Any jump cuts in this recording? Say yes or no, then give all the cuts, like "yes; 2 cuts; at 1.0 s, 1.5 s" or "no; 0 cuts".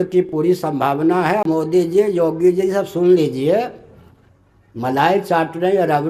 yes; 1 cut; at 1.5 s